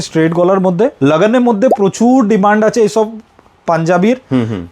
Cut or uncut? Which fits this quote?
cut